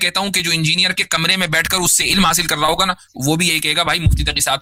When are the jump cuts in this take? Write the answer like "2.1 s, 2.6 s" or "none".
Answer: none